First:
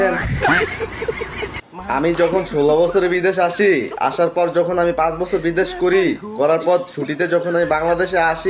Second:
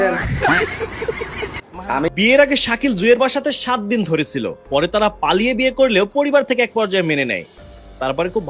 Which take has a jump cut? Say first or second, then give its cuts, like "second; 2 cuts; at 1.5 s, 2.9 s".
second; 1 cut; at 2.1 s